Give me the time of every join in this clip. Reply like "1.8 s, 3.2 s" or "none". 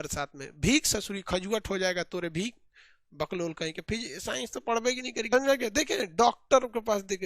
5.3 s